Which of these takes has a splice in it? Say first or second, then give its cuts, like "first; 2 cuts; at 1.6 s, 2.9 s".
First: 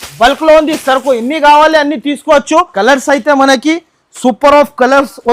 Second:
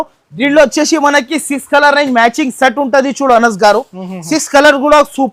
first; 1 cut; at 2.7 s